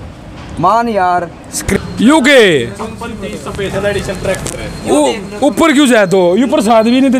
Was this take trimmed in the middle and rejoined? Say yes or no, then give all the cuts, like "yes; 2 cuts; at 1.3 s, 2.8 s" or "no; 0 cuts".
yes; 1 cut; at 1.8 s